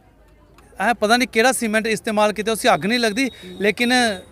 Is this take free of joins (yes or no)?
yes